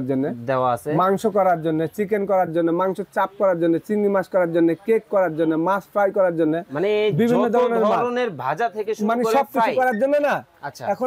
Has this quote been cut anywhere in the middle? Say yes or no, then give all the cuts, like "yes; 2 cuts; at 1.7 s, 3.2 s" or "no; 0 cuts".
no; 0 cuts